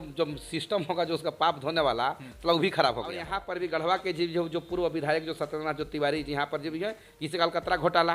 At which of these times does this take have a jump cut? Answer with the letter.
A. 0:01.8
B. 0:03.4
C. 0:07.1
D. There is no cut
B